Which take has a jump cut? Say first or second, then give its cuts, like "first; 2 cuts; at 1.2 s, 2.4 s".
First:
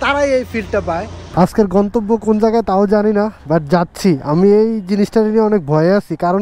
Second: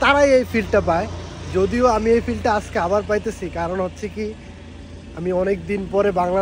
first; 1 cut; at 1.2 s